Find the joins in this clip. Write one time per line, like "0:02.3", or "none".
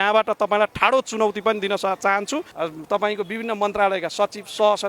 0:02.5